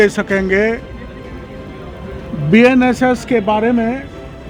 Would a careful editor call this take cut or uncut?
uncut